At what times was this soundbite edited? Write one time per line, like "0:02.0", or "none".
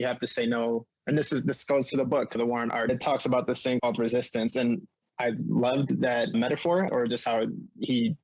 0:06.9